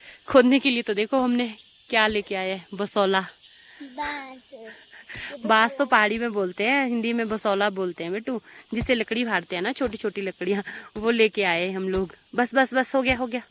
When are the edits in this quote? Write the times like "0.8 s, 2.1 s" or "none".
none